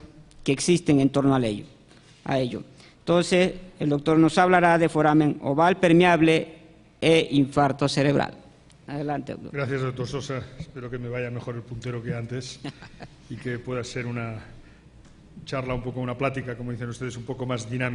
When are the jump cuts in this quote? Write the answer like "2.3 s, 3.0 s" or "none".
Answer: none

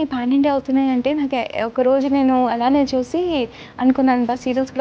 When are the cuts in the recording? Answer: none

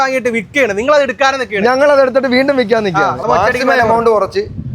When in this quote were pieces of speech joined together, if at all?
3.2 s

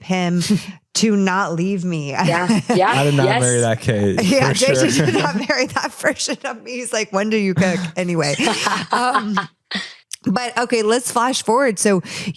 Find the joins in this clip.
none

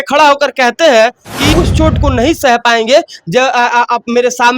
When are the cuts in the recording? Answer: 1.5 s

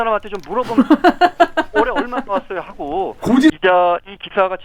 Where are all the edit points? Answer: 3.5 s

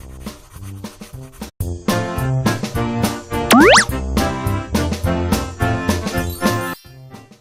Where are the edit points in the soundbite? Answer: none

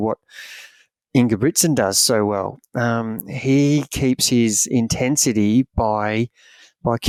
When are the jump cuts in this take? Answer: none

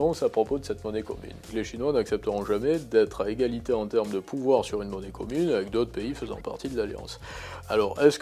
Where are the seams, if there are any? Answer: 1.5 s

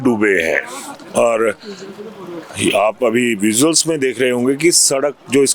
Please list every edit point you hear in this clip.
none

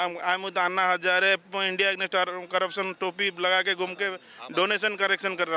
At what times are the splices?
none

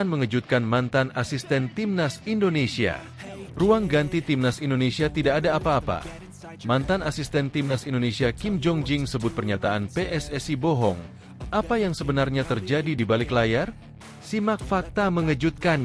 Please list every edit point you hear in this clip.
none

